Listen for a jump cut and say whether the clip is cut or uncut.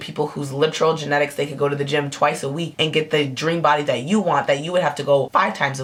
uncut